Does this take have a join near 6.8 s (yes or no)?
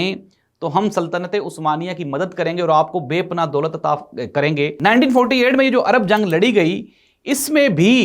no